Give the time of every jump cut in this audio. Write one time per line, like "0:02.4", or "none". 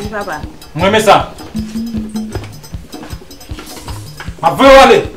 0:01.4
0:04.4